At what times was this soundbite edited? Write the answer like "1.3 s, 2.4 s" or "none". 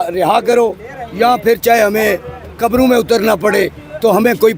none